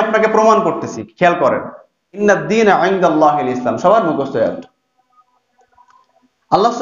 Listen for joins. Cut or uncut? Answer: cut